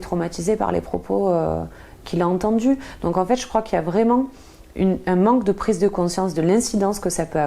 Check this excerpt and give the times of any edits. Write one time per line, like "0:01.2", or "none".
none